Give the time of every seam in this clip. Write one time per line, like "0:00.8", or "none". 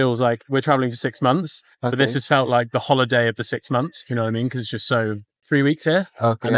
0:05.3